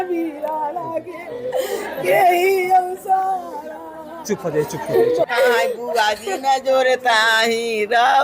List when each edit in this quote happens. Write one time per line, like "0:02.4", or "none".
0:05.3